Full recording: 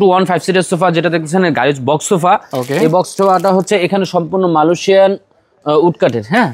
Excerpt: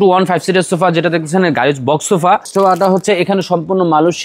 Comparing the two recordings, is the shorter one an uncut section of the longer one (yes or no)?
no